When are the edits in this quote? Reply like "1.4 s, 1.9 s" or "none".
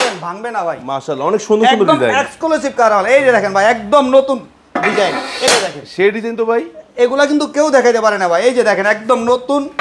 none